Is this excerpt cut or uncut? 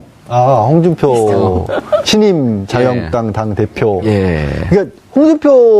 cut